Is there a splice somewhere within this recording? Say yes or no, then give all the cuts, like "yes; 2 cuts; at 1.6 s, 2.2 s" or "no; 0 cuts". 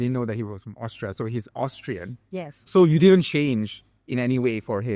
yes; 1 cut; at 2.6 s